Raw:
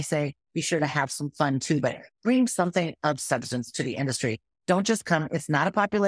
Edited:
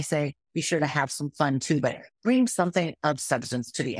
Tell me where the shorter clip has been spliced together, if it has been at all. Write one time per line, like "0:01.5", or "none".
none